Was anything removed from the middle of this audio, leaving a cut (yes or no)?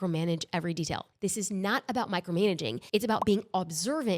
yes